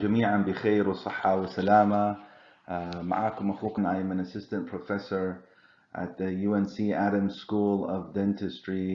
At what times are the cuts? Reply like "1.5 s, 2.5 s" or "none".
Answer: 3.8 s